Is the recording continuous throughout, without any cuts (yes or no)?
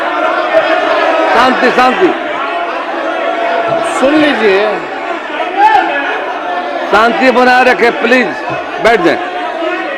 yes